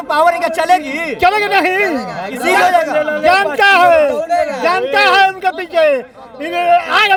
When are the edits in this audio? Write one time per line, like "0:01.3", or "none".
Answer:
none